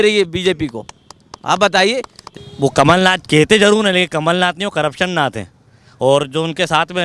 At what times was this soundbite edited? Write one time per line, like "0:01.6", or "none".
0:02.2